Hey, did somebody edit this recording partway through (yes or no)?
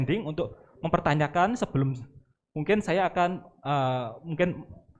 no